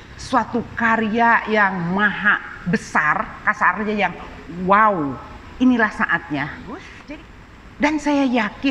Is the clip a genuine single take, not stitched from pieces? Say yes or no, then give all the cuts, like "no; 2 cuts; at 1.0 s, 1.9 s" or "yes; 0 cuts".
no; 1 cut; at 6.9 s